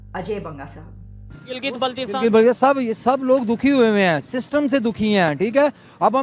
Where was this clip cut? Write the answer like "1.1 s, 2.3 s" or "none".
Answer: 1.4 s